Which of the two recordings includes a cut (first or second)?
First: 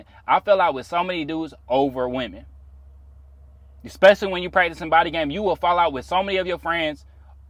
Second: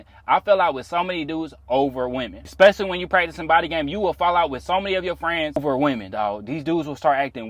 second